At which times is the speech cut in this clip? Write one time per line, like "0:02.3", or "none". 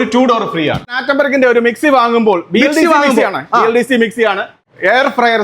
0:01.0
0:04.5